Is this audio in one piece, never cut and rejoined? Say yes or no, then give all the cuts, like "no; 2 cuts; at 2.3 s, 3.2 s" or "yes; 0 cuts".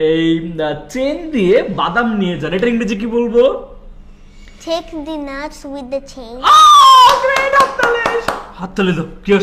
yes; 0 cuts